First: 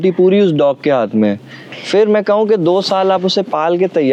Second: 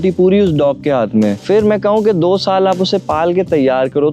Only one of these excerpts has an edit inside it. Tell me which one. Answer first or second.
second